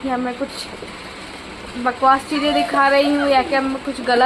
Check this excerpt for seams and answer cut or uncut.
uncut